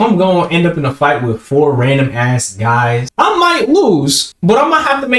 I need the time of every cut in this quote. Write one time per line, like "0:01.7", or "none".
0:03.1
0:04.2